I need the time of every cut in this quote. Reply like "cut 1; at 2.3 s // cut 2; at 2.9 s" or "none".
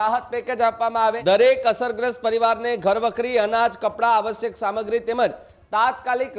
cut 1; at 1.2 s